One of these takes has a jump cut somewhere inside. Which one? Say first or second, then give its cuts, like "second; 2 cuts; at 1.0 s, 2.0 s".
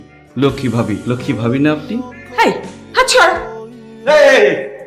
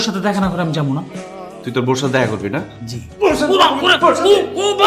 first; 1 cut; at 3.4 s